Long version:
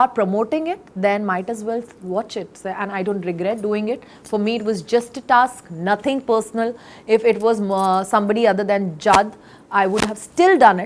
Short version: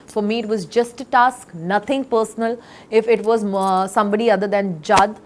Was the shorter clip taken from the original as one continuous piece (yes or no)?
yes